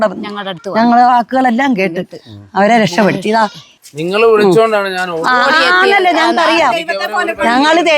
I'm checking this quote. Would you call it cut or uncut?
uncut